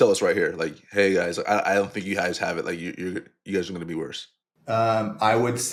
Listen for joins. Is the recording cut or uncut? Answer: uncut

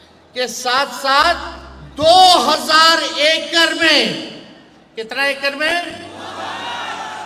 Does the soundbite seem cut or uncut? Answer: uncut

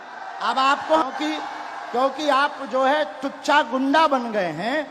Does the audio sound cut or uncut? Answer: cut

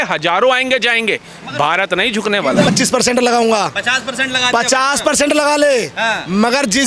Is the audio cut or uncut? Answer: cut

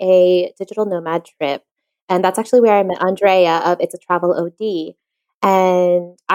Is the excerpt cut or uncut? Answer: uncut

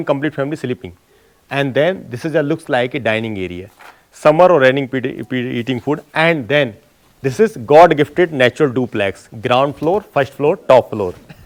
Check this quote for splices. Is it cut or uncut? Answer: uncut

